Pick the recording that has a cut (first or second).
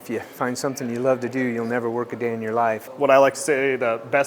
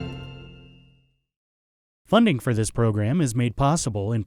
first